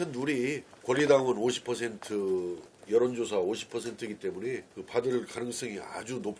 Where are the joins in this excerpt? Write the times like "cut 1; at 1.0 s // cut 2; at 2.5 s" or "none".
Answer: none